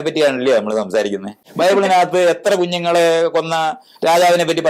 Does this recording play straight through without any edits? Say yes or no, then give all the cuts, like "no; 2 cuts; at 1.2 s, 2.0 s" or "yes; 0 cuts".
no; 1 cut; at 1.4 s